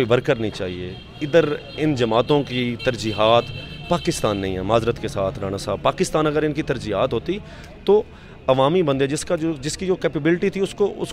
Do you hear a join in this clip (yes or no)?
no